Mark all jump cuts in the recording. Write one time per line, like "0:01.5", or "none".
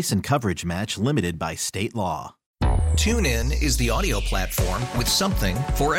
0:02.4